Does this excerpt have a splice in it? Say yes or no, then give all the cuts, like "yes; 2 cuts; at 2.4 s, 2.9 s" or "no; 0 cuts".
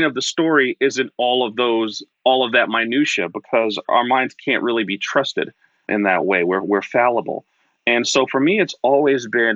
yes; 2 cuts; at 3.8 s, 5.9 s